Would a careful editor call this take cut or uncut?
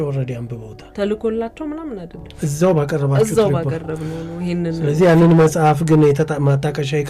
cut